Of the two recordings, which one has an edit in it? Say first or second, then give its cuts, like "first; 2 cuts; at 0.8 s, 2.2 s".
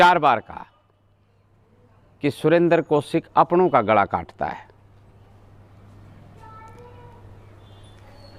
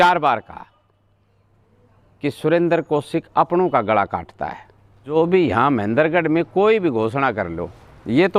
second; 1 cut; at 5.1 s